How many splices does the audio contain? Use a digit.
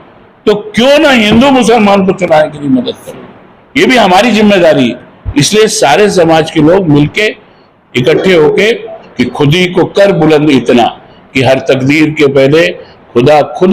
1